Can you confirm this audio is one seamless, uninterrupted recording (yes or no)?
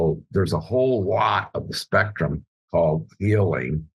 yes